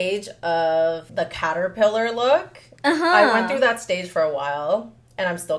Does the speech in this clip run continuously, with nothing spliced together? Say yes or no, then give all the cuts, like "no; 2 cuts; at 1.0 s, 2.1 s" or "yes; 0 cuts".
no; 1 cut; at 1.0 s